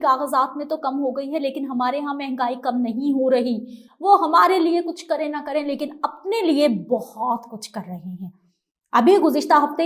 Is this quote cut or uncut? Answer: uncut